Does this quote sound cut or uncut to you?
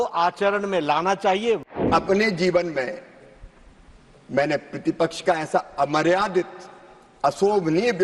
cut